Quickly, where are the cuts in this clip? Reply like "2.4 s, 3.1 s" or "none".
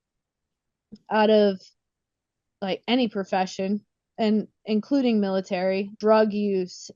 6.0 s